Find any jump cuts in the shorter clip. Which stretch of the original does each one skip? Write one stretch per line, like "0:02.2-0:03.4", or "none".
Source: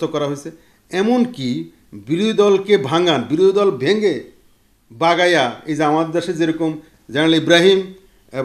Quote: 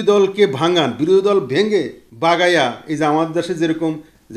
0:04.3-0:04.8